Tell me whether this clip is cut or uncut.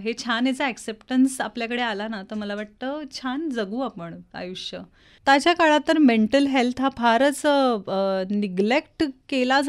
cut